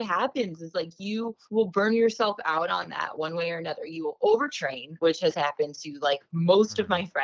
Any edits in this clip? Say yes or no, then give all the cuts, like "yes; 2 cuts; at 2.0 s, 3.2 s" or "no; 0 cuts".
no; 0 cuts